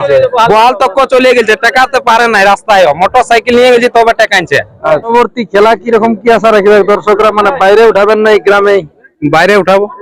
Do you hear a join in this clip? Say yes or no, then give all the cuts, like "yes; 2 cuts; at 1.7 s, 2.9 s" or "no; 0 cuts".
yes; 1 cut; at 5.1 s